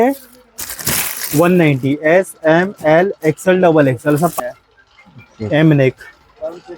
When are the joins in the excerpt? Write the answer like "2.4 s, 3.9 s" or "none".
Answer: 4.4 s

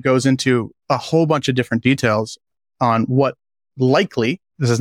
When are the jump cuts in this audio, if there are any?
none

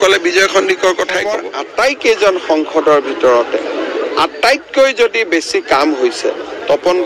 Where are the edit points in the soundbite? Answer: 1.4 s

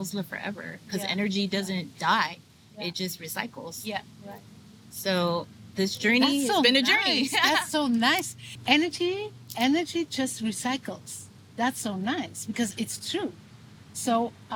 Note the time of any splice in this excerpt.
none

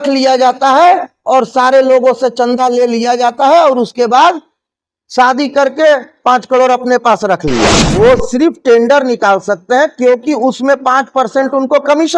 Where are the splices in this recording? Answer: 7.8 s

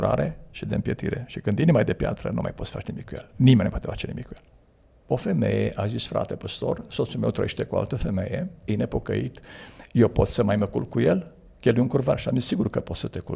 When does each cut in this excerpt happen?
5.0 s

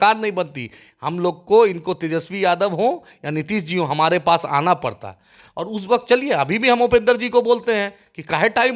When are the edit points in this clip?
none

